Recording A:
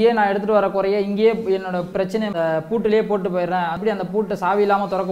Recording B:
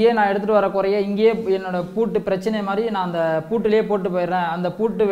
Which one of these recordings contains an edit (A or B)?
A